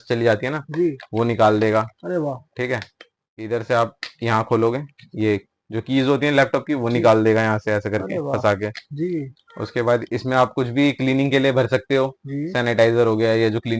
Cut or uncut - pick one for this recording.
uncut